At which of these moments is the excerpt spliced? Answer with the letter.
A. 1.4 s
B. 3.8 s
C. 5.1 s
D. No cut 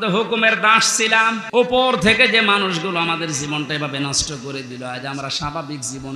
A